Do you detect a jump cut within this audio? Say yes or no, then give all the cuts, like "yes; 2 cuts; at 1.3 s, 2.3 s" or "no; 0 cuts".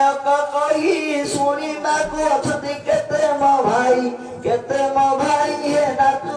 no; 0 cuts